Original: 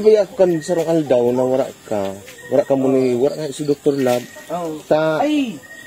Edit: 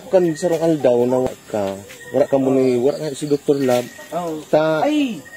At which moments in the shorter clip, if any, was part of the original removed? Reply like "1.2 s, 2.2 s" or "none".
1.3 s